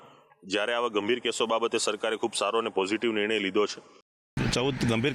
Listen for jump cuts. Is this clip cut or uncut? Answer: cut